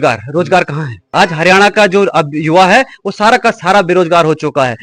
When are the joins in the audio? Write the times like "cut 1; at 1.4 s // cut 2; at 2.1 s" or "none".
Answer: cut 1; at 0.9 s